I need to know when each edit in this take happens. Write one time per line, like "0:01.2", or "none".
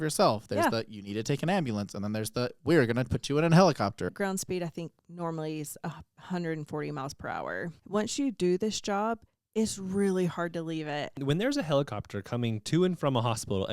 0:04.1
0:07.7
0:11.2